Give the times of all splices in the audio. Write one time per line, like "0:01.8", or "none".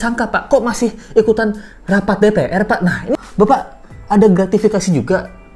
0:03.1